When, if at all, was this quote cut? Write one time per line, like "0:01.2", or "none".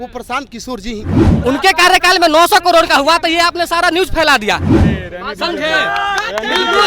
0:01.3
0:04.7